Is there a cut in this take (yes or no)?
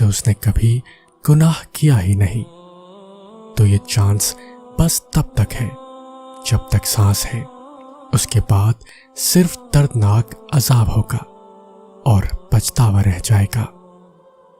yes